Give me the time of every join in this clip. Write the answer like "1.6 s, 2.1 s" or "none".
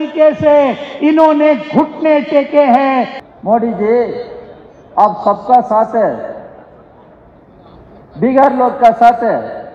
3.2 s